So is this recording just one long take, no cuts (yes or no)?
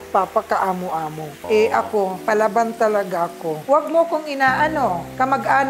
no